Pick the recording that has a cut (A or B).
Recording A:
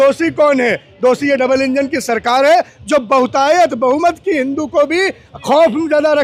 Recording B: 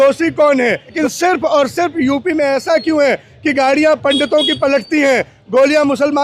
B